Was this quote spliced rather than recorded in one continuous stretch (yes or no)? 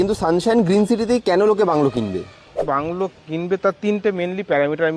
yes